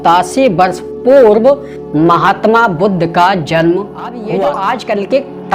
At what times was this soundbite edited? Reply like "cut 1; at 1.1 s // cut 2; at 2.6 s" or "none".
cut 1; at 4.2 s